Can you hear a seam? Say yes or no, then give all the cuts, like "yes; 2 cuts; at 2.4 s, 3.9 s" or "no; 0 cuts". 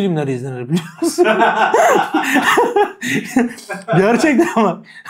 no; 0 cuts